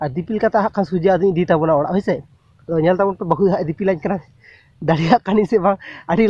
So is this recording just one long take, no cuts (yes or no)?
yes